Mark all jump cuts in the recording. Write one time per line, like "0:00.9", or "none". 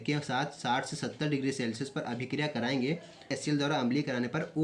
0:03.3